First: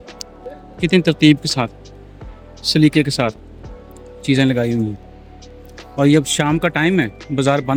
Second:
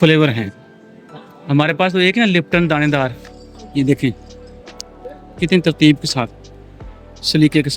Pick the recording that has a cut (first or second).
second